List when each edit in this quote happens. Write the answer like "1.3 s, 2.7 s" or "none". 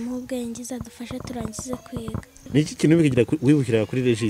2.4 s